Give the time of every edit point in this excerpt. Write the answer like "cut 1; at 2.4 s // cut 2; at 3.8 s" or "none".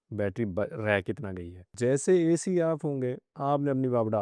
cut 1; at 1.7 s // cut 2; at 3.3 s